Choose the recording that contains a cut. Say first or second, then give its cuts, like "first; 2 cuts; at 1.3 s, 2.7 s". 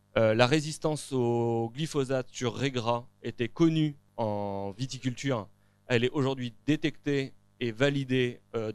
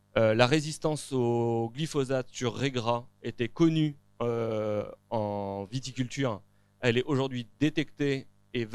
first; 1 cut; at 4.0 s